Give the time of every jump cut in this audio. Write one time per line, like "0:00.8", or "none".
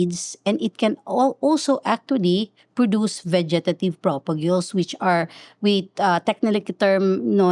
none